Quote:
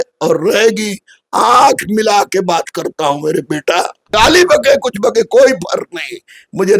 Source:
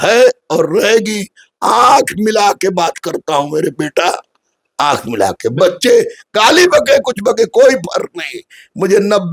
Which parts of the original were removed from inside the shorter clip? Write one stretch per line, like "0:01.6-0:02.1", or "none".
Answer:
0:04.3-0:06.2